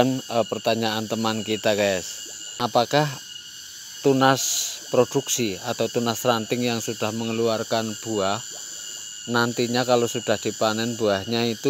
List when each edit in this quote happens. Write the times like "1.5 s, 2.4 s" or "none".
2.6 s